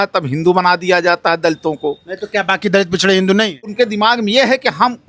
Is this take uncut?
no; 1 cut; at 3.7 s

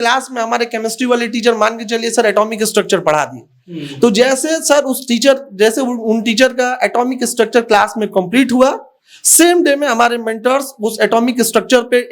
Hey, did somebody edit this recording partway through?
no; 0 cuts

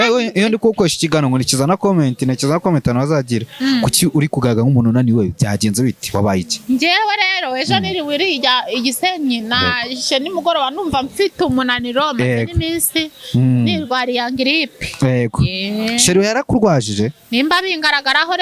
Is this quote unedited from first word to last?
yes; 0 cuts

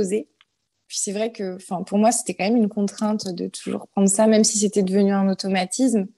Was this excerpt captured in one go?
no; 1 cut; at 0.9 s

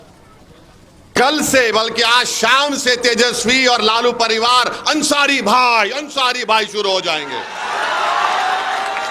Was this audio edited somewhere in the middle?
no; 0 cuts

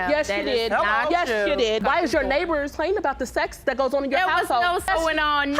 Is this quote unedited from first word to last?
no; 1 cut; at 1.8 s

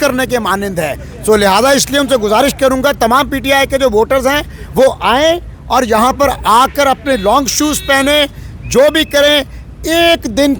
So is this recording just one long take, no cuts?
yes; 0 cuts

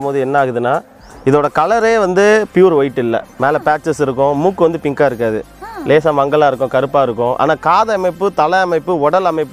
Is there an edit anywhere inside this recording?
no; 0 cuts

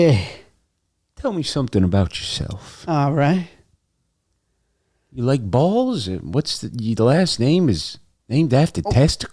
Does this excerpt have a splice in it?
no; 0 cuts

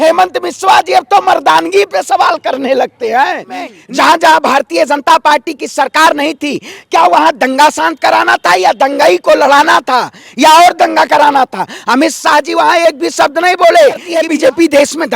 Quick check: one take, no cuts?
no; 2 cuts; at 3.8 s, 14.1 s

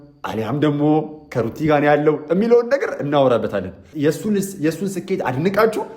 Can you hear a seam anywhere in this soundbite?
yes; 1 cut; at 3.8 s

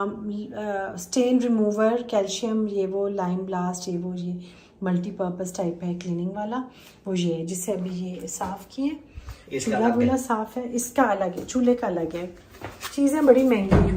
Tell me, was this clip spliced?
no; 0 cuts

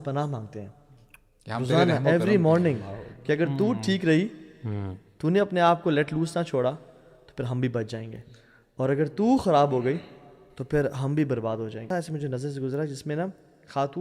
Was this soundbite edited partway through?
yes; 1 cut; at 11.9 s

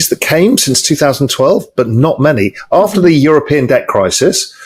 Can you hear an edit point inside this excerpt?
no; 0 cuts

